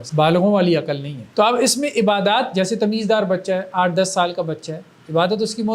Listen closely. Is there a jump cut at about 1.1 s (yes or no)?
yes